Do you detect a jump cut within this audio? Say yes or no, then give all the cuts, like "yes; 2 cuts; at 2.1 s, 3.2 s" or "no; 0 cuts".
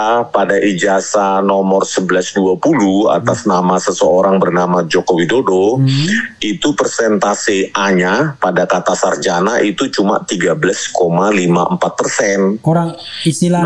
no; 0 cuts